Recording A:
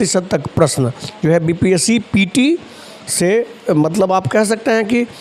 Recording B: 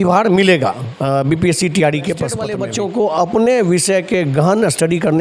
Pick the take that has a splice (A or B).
B